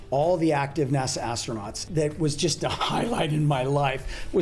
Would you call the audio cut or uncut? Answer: cut